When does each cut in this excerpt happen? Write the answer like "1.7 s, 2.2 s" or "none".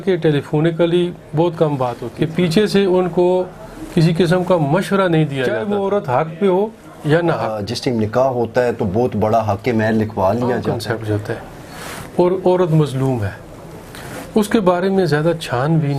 2.0 s, 5.6 s, 7.7 s, 10.7 s